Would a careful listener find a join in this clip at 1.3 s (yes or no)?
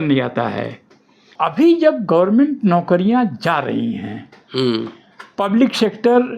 yes